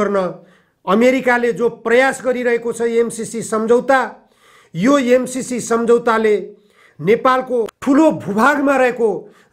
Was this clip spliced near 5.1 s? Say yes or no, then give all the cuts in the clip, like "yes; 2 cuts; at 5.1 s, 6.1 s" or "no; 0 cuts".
no; 1 cut; at 7.7 s